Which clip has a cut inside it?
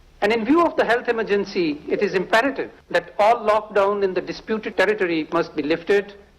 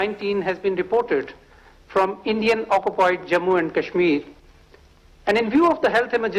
first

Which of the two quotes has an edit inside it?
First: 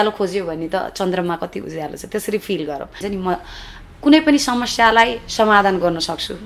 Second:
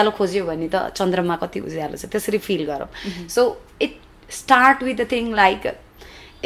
first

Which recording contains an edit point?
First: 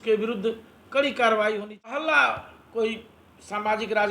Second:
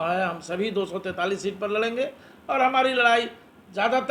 first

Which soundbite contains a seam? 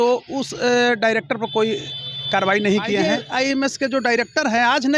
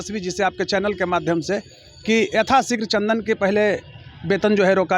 first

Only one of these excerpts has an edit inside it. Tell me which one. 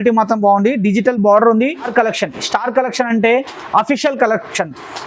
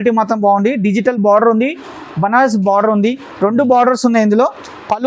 first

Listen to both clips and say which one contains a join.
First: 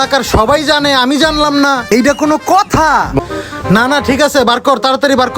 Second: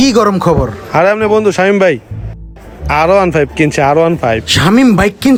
first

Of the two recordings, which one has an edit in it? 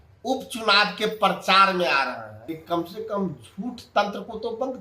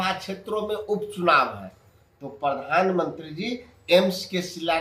first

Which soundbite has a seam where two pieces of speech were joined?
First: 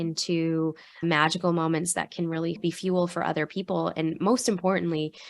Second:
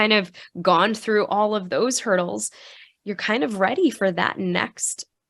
first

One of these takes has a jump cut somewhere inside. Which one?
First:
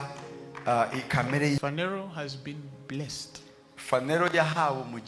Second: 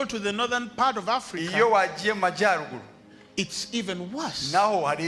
first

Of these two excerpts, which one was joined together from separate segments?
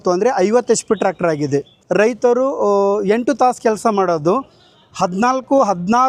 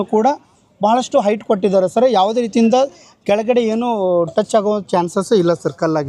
first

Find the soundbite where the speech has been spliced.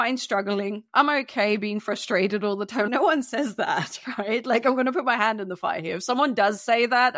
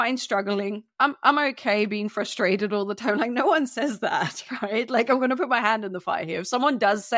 first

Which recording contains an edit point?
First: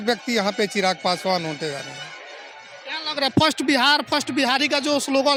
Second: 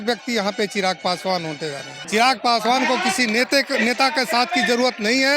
second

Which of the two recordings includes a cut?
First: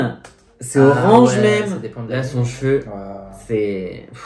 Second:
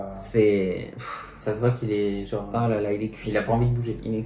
first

